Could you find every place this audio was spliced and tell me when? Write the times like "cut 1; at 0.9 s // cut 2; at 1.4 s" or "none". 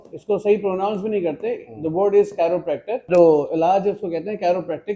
cut 1; at 3.1 s